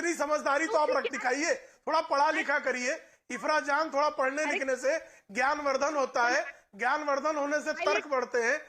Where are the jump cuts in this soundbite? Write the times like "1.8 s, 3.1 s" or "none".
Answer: none

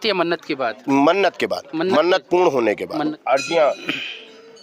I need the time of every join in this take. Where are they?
3.2 s

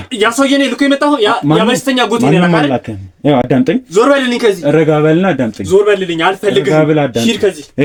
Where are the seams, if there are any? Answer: none

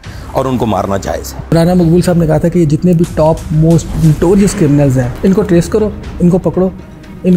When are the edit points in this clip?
1.5 s, 3.9 s, 5.1 s

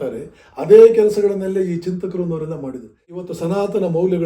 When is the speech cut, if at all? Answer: 3.2 s

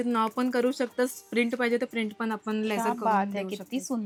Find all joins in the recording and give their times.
none

